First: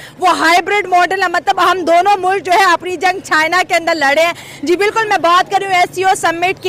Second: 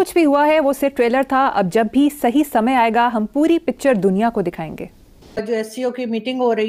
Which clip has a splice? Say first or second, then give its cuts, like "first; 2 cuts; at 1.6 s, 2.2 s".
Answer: second; 1 cut; at 5.4 s